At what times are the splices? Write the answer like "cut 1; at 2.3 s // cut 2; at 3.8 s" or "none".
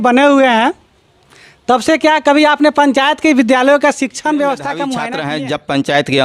cut 1; at 5.2 s